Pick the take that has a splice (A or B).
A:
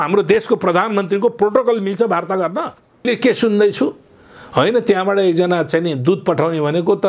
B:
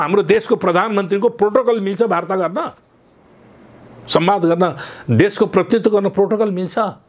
A